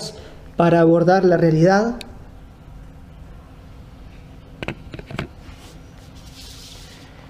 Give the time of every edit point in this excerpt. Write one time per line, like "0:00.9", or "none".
0:05.1